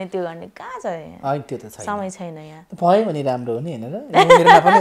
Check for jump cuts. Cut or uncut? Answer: uncut